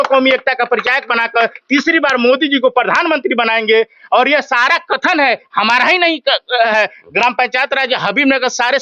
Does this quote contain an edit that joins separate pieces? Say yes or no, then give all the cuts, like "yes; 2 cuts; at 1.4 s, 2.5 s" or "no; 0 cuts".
no; 0 cuts